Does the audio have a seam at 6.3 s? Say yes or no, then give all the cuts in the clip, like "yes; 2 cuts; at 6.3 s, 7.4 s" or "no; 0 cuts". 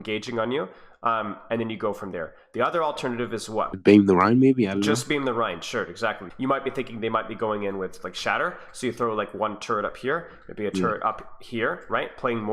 yes; 2 cuts; at 3.8 s, 6.3 s